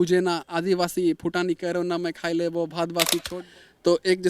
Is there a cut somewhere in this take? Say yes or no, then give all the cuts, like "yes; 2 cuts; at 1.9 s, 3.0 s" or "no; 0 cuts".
yes; 1 cut; at 3.3 s